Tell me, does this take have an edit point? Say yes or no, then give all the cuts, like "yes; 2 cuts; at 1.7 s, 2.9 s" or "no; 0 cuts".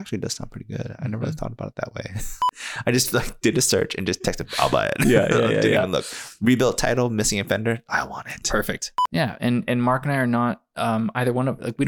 yes; 2 cuts; at 2.6 s, 9.0 s